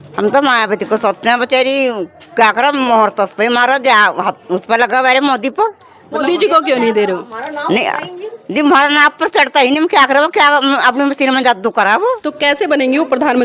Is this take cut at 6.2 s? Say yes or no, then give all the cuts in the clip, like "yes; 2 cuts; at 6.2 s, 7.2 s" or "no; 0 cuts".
yes; 2 cuts; at 6.2 s, 12.3 s